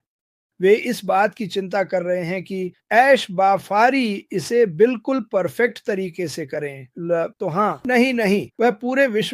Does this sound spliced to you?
yes; 1 cut; at 7.8 s

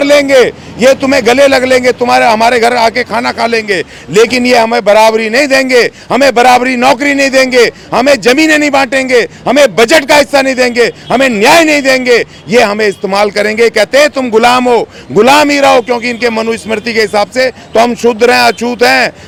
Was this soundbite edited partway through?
no; 0 cuts

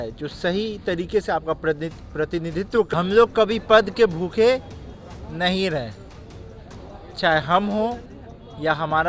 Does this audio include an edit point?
yes; 1 cut; at 2.9 s

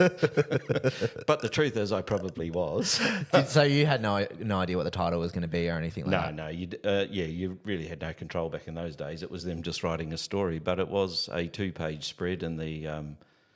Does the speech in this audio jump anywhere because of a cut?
no; 0 cuts

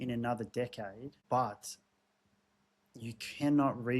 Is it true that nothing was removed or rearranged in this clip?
no; 1 cut; at 1.1 s

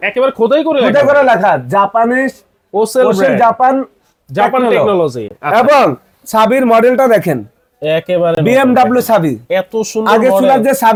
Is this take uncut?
yes; 0 cuts

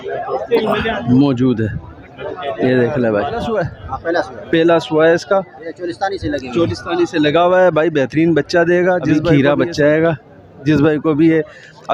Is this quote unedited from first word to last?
no; 2 cuts; at 3.5 s, 9.2 s

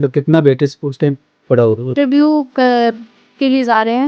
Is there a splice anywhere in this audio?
yes; 1 cut; at 2.0 s

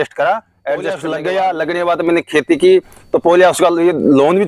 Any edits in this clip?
yes; 1 cut; at 0.9 s

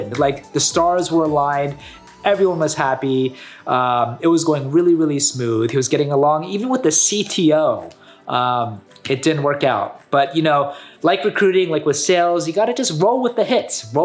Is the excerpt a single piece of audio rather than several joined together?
yes; 0 cuts

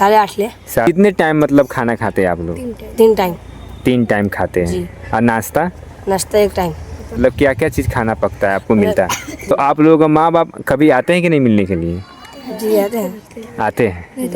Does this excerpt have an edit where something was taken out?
yes; 3 cuts; at 0.9 s, 7.2 s, 9.5 s

